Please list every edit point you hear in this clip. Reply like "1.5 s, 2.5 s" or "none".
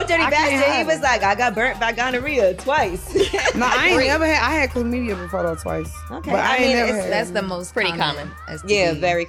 none